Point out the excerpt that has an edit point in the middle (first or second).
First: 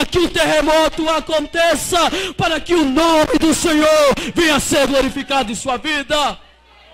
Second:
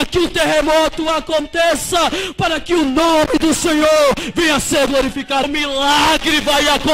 second